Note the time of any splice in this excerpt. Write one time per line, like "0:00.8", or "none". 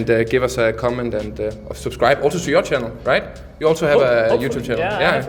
none